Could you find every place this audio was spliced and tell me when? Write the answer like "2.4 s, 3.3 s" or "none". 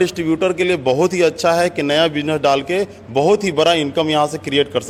none